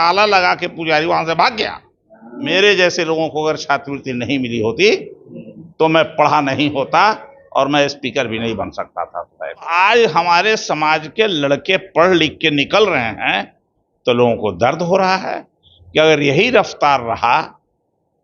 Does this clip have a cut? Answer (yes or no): yes